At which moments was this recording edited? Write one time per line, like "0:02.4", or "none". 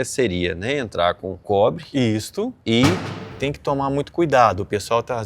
0:01.3
0:02.6
0:03.3